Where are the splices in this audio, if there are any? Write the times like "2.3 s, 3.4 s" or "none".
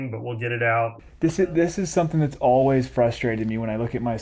1.0 s